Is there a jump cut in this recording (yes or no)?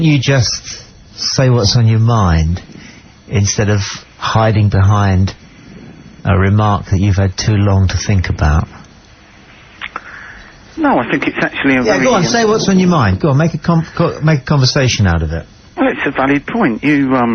yes